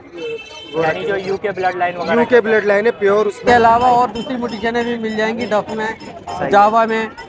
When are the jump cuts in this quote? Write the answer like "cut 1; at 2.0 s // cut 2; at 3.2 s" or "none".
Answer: cut 1; at 3.4 s